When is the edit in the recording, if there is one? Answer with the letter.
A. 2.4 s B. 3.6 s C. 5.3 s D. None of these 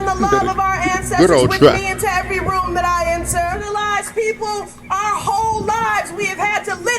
B